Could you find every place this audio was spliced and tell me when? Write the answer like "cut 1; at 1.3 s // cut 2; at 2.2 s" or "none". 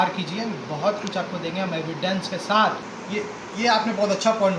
cut 1; at 2.8 s